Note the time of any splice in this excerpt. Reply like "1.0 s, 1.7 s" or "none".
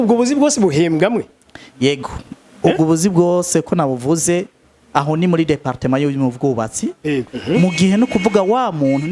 7.3 s

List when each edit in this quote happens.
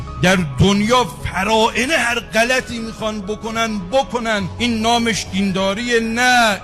none

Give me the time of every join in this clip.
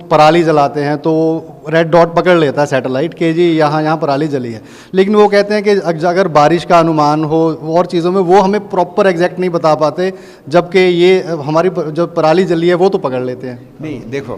none

